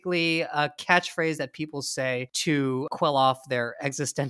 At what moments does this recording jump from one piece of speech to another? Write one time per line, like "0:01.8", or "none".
0:02.8